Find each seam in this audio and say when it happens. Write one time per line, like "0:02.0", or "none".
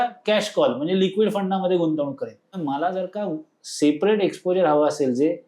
0:02.6